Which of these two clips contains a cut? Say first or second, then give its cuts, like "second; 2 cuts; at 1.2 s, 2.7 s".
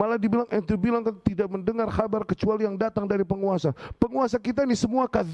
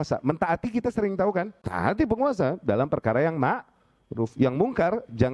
second; 2 cuts; at 1.6 s, 4.3 s